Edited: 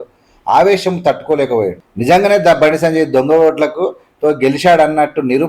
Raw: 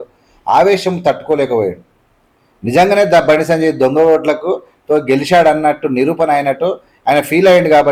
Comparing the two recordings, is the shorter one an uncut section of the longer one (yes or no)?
no